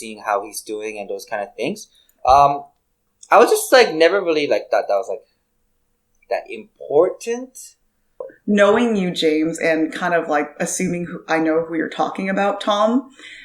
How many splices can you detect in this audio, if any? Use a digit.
1